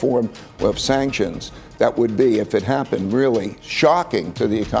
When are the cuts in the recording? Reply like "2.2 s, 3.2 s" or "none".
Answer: 3.9 s